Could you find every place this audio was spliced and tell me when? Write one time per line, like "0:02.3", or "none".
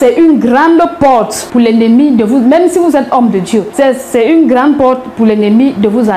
0:01.4
0:03.7